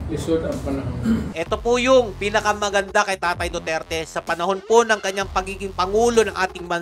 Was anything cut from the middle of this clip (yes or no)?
no